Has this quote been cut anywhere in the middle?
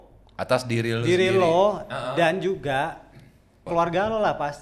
yes; 1 cut; at 3.6 s

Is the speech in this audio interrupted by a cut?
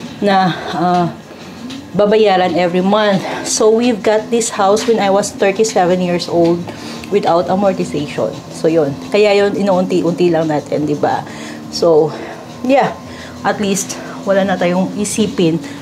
no; 0 cuts

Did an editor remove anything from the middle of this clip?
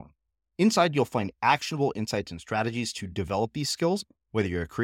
no; 0 cuts

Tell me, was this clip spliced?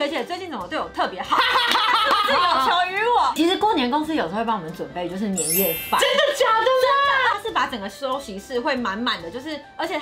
yes; 2 cuts; at 3.4 s, 7.3 s

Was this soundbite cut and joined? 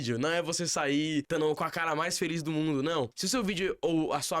yes; 2 cuts; at 1.3 s, 3.2 s

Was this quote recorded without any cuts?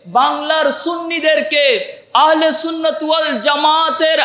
yes; 0 cuts

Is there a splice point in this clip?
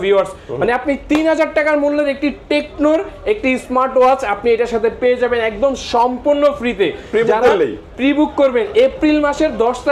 no; 0 cuts

